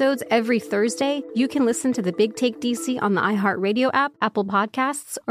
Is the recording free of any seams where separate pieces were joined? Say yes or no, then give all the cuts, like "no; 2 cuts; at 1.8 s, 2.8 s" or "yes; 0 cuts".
no; 2 cuts; at 1.2 s, 4.1 s